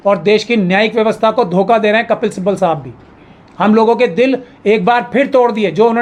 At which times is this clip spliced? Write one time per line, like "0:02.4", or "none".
none